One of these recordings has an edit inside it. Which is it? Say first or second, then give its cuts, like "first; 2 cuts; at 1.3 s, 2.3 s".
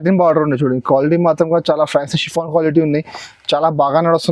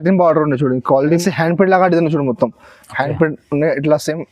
second; 1 cut; at 1.2 s